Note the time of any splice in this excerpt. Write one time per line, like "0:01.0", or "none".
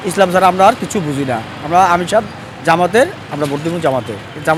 none